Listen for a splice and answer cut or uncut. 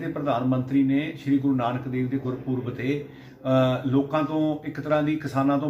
uncut